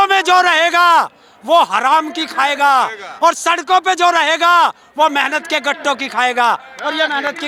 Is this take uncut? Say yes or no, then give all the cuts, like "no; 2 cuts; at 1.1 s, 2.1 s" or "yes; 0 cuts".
yes; 0 cuts